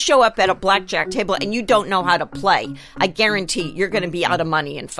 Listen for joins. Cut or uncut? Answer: cut